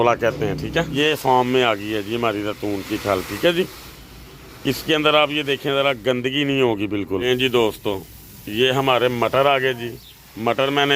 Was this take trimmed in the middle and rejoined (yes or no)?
yes